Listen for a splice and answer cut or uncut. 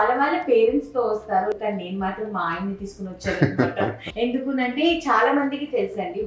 cut